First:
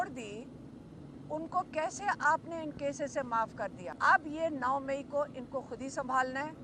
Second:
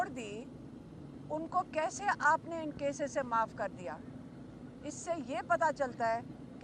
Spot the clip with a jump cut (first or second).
first